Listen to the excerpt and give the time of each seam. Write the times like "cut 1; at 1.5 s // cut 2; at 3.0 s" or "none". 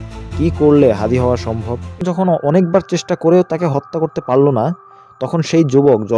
cut 1; at 2.0 s